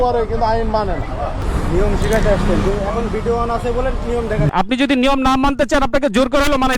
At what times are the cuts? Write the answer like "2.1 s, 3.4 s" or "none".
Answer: 1.4 s, 4.5 s